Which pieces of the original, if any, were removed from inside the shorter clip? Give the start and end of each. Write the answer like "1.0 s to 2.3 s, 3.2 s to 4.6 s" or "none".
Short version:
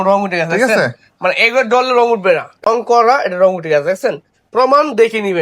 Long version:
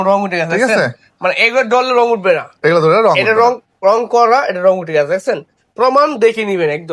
2.7 s to 3.9 s